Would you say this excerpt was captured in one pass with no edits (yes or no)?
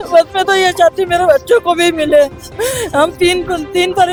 yes